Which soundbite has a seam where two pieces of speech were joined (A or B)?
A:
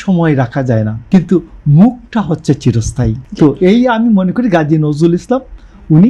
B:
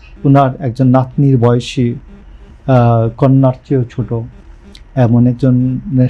A